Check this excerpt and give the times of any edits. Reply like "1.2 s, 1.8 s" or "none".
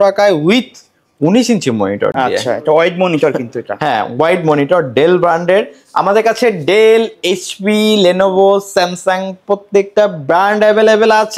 none

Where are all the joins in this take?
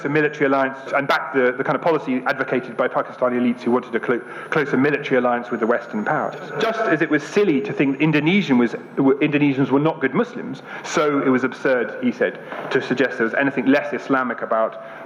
0.8 s, 6.5 s

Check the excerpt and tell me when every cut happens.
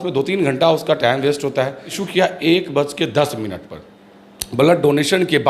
2.0 s

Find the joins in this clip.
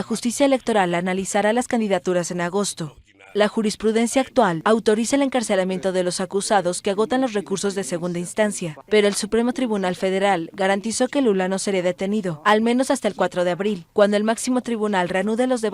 7.0 s

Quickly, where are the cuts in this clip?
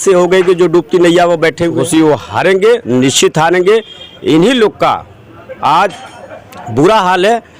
1.8 s

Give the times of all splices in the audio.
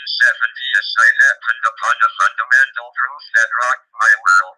1.2 s, 3.4 s

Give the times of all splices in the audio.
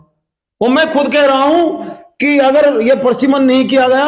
none

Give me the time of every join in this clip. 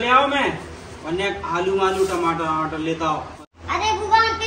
3.3 s

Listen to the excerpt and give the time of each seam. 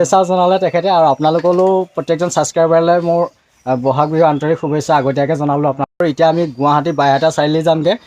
6.0 s

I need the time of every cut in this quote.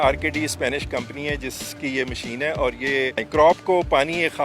3.2 s

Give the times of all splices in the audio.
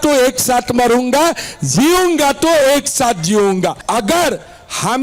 3.8 s

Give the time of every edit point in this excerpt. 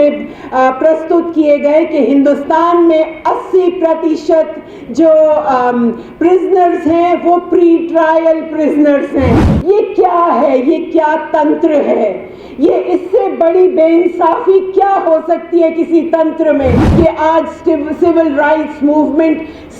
9.5 s, 16.8 s

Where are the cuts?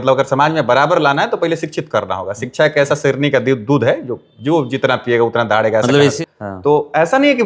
6.2 s

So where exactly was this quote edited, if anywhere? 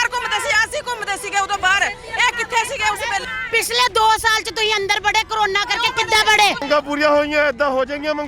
6.6 s

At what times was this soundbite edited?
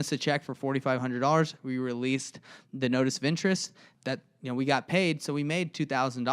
3.8 s

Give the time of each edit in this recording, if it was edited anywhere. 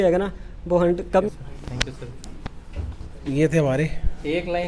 1.3 s

